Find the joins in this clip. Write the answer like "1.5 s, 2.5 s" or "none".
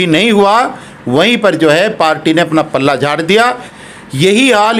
3.7 s